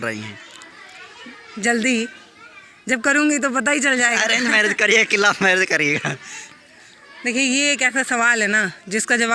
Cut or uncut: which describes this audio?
uncut